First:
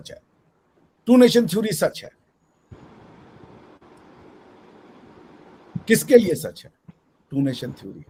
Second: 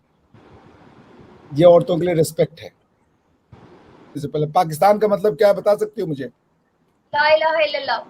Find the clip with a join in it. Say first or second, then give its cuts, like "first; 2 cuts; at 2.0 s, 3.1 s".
second; 1 cut; at 4.2 s